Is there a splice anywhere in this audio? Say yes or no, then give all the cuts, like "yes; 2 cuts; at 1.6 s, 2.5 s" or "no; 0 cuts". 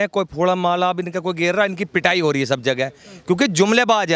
no; 0 cuts